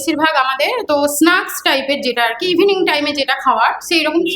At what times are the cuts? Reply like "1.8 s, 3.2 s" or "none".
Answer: none